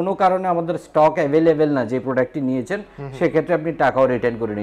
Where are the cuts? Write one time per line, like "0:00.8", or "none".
none